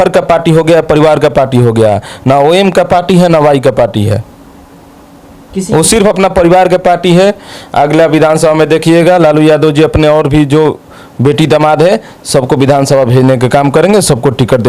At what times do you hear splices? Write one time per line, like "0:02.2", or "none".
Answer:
none